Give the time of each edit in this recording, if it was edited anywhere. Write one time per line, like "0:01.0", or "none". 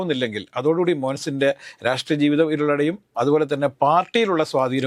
none